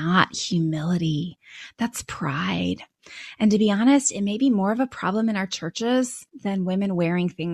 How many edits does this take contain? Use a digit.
1